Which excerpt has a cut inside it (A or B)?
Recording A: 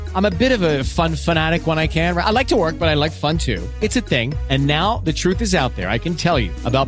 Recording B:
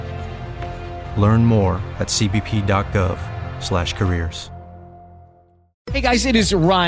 B